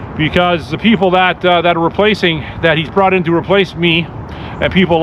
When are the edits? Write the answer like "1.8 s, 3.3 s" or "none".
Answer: none